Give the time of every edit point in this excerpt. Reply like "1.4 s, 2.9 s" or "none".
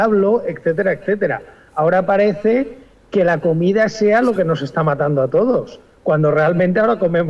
1.9 s